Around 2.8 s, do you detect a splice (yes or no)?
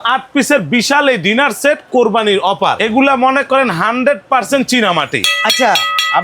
yes